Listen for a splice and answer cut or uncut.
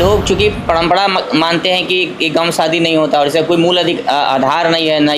uncut